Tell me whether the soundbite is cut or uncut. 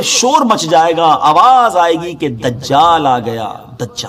uncut